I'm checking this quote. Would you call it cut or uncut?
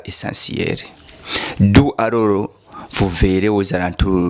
uncut